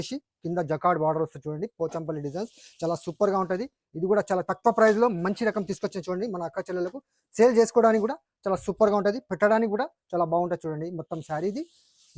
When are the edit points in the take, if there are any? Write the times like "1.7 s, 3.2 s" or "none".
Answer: none